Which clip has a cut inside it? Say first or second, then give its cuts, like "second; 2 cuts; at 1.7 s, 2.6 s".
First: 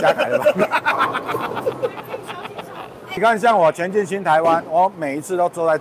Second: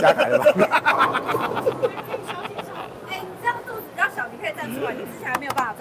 first; 1 cut; at 3.2 s